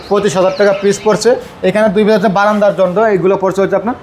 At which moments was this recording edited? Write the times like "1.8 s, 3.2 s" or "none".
none